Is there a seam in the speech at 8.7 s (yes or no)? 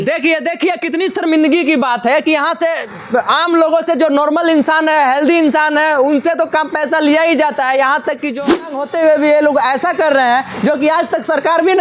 yes